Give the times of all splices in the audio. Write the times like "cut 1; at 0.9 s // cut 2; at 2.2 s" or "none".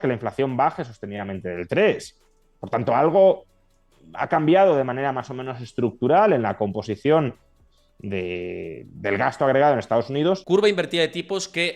cut 1; at 10.4 s